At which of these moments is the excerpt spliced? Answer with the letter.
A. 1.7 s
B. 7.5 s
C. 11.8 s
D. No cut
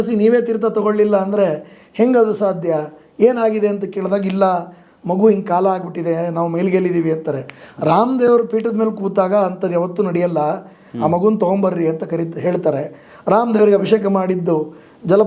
D